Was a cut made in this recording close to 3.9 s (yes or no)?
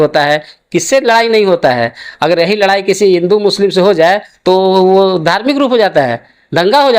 no